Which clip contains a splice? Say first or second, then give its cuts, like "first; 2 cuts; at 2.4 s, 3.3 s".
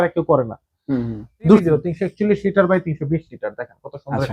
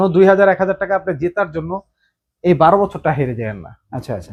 first; 1 cut; at 1.6 s